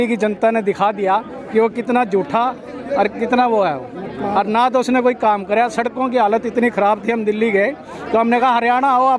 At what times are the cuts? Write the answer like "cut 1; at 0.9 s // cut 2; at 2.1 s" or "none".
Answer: none